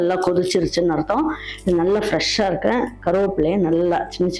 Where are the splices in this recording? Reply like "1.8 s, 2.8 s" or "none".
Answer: none